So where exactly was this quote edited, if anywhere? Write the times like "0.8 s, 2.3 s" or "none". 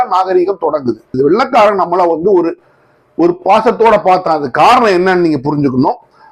1.2 s